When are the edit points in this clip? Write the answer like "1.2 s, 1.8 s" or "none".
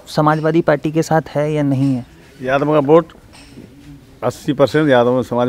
none